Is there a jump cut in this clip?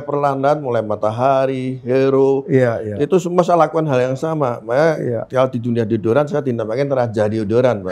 no; 0 cuts

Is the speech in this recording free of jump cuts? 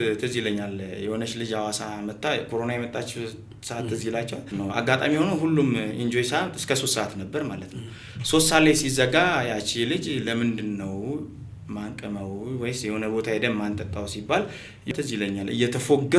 no; 2 cuts; at 4.6 s, 14.9 s

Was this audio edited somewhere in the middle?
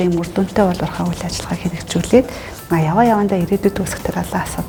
no; 0 cuts

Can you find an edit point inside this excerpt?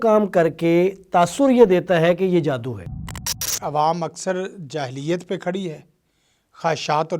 yes; 1 cut; at 3.2 s

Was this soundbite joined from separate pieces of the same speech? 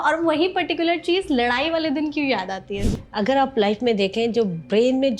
yes; 1 cut; at 2.9 s

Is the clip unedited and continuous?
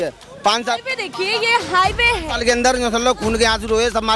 yes; 0 cuts

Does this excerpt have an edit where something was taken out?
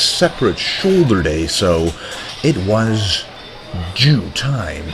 yes; 1 cut; at 3.1 s

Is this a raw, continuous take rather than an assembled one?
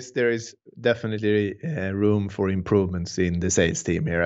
yes; 0 cuts

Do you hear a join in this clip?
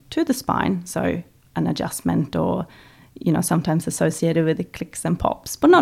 no; 0 cuts

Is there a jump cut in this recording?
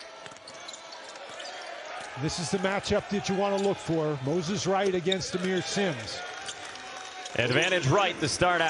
no; 0 cuts

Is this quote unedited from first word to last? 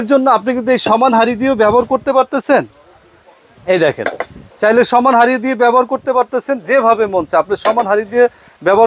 yes; 0 cuts

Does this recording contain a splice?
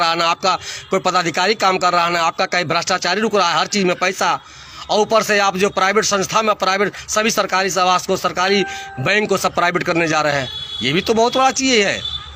no; 0 cuts

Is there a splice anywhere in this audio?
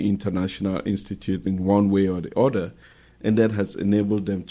yes; 1 cut; at 1.4 s

